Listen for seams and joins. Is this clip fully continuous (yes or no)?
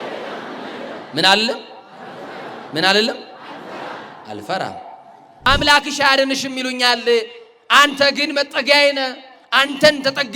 no